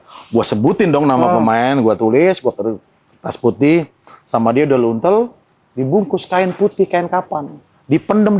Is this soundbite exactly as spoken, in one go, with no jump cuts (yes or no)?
yes